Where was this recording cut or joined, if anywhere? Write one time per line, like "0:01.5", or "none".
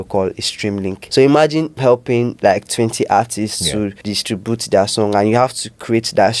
0:01.0
0:02.0
0:04.0